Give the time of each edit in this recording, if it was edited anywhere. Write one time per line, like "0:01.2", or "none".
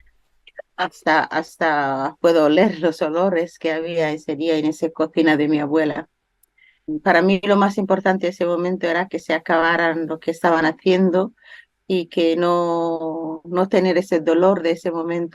0:06.9